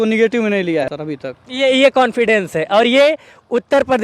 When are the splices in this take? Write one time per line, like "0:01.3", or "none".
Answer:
0:00.9

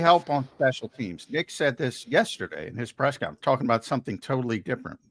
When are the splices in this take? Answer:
none

